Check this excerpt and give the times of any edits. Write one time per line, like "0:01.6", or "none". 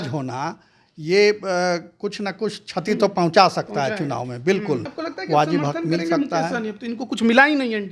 0:05.0